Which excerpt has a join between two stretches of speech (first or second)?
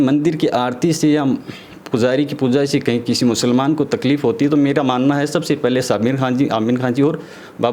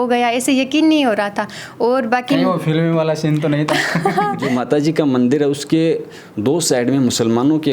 second